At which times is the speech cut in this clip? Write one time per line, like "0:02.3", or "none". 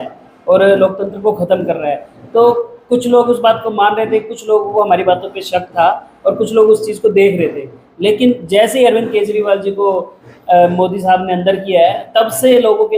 none

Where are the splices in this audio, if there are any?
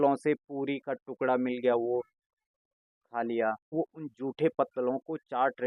0:03.7

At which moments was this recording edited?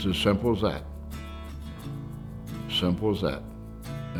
none

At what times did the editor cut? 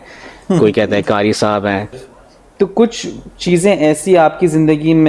0:02.0

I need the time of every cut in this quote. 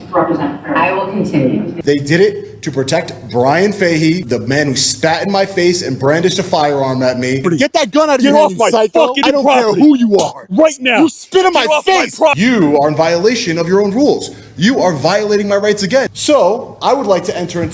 0:01.7
0:04.2
0:09.2
0:12.3
0:16.1

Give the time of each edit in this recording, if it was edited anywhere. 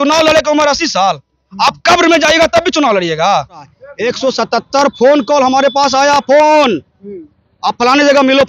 0:03.8

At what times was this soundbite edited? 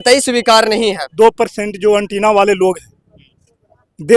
0:01.1

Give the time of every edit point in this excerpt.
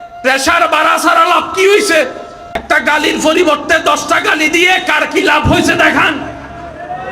0:02.6

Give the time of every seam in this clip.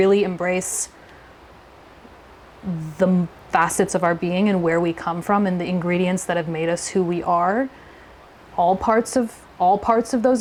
none

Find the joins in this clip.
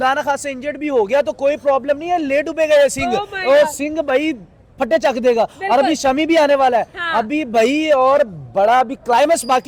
none

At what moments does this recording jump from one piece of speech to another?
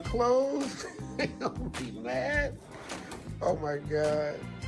0:02.6

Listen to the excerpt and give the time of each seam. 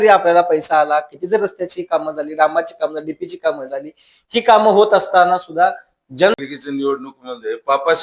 0:06.4

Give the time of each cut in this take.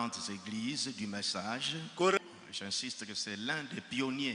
0:02.2

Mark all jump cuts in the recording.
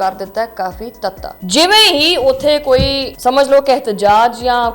0:01.3
0:03.1

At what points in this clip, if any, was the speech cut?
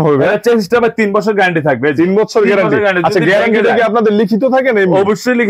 none

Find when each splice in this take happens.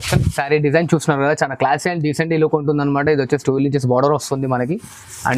none

